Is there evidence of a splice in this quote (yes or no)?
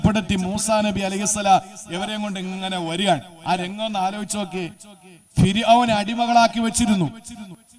no